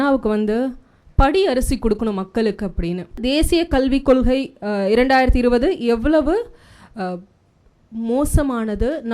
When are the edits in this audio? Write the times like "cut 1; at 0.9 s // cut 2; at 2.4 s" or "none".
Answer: cut 1; at 3.2 s